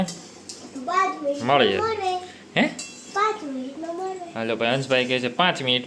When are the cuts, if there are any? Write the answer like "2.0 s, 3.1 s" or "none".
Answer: none